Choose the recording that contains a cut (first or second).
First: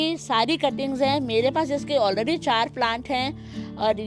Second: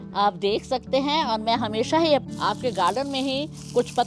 second